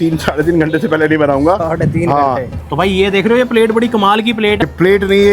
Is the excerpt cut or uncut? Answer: cut